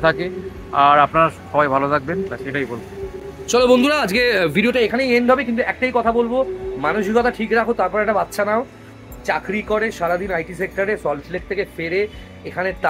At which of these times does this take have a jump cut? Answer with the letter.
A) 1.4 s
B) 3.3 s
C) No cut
C